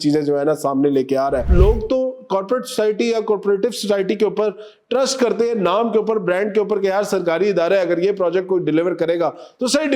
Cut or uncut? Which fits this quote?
cut